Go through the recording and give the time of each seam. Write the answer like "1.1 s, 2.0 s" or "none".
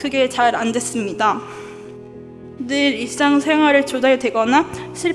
none